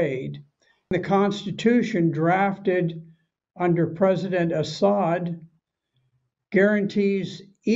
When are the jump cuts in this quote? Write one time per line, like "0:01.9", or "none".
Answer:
0:00.9